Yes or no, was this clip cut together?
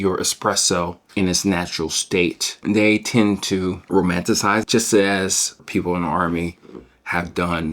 yes